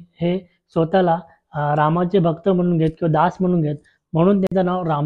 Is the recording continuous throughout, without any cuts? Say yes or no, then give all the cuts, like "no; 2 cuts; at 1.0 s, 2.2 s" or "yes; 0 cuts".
yes; 0 cuts